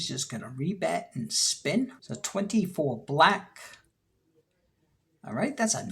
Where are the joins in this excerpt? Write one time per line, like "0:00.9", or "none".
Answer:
0:02.1